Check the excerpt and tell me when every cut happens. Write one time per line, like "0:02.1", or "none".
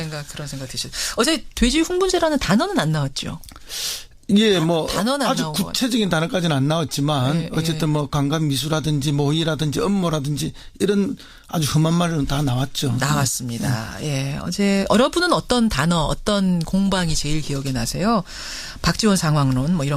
0:03.9